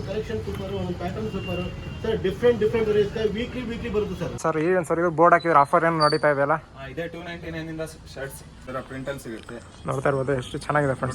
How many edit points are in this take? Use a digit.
2